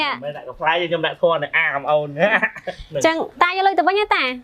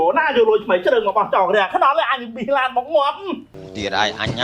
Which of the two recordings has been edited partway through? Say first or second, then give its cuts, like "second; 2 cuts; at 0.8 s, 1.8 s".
second; 1 cut; at 3.2 s